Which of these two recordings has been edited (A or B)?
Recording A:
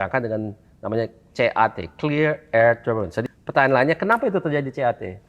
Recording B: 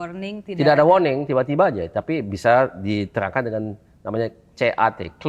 A